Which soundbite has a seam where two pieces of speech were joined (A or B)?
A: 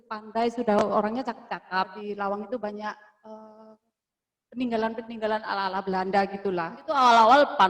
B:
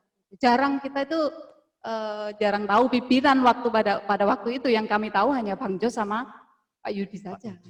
A